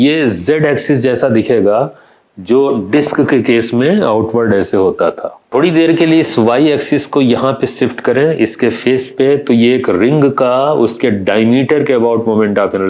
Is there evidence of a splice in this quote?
yes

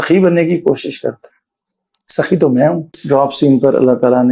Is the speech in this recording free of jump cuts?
no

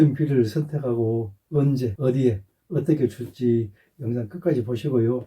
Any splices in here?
yes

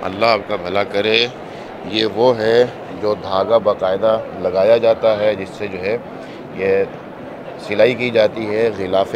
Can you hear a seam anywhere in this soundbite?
no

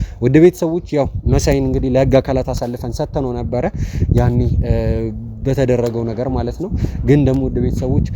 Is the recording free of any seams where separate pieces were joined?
yes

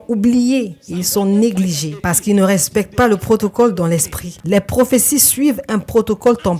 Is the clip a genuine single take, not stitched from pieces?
no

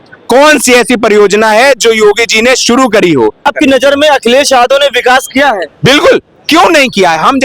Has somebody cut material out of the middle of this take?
yes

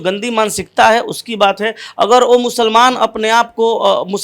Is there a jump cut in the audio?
no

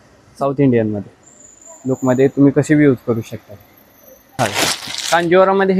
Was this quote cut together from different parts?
yes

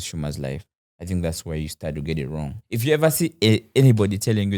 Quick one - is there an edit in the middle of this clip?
yes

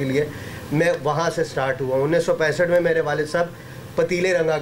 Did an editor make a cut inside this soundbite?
no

